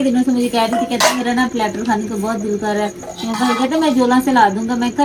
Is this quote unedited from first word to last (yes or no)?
yes